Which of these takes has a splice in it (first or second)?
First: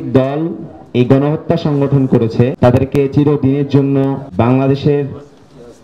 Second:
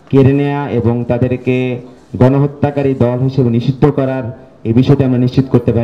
first